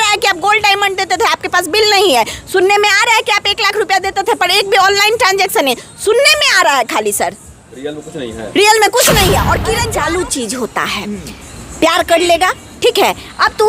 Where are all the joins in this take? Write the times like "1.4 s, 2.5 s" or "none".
9.8 s